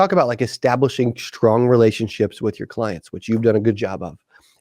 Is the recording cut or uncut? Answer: uncut